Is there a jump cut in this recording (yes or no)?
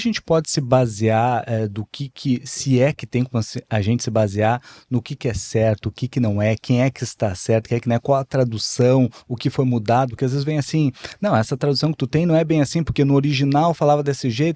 no